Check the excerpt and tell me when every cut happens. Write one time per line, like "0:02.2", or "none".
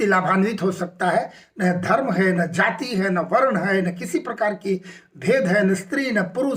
none